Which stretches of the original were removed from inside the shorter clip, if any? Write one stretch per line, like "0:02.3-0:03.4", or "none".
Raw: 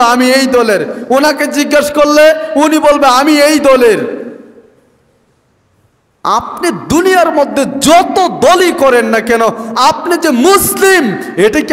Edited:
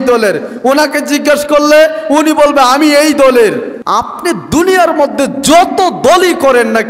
0:04.2-0:06.1